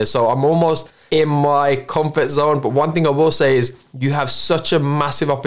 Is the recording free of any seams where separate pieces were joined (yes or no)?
no